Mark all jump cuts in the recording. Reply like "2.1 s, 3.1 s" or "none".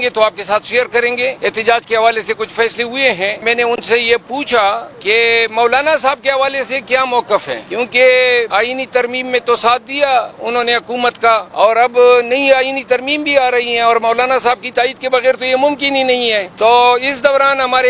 1.4 s, 3.4 s, 4.9 s, 7.6 s, 8.5 s, 11.5 s, 16.5 s